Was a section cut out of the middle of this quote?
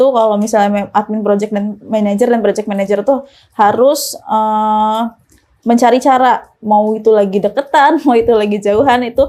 no; 0 cuts

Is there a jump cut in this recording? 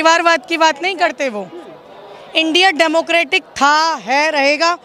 no; 0 cuts

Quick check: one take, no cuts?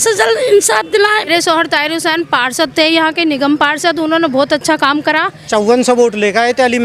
no; 2 cuts; at 1.3 s, 5.4 s

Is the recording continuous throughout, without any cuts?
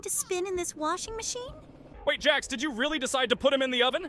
no; 1 cut; at 1.8 s

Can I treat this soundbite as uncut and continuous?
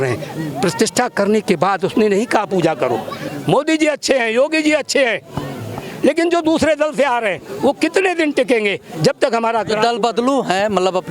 no; 1 cut; at 3.2 s

